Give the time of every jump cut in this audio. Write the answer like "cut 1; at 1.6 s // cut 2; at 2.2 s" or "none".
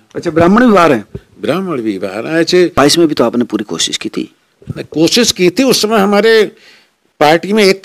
cut 1; at 2.7 s